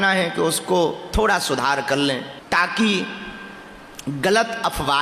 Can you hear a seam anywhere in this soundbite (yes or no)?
yes